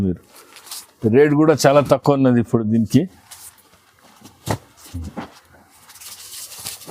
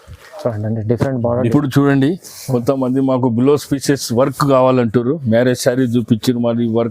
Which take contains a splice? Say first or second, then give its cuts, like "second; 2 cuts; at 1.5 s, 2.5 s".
second; 1 cut; at 1.5 s